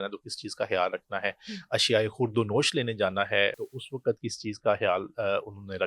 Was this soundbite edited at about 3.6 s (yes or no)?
yes